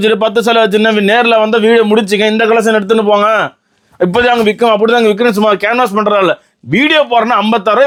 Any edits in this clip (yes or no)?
no